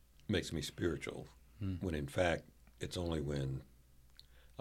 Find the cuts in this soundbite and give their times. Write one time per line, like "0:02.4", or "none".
none

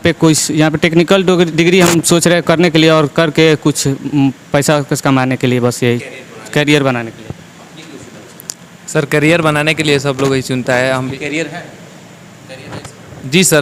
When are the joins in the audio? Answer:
none

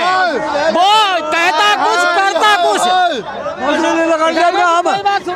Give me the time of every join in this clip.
none

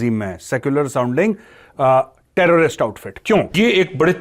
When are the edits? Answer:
0:03.0

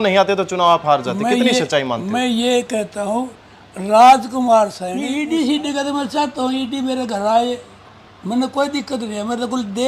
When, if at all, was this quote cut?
0:04.9

